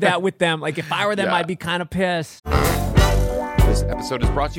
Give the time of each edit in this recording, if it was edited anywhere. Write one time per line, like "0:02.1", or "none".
0:02.4